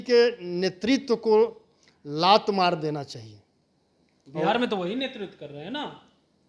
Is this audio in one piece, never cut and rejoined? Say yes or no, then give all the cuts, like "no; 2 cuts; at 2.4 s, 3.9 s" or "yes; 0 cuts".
yes; 0 cuts